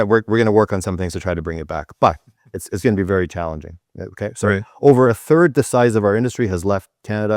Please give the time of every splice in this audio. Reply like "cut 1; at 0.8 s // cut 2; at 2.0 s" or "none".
none